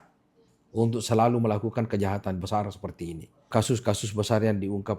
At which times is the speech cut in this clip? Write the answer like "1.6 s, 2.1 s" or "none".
3.5 s